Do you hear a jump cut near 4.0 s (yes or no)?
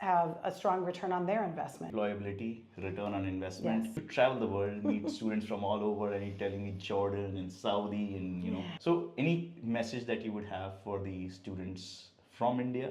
yes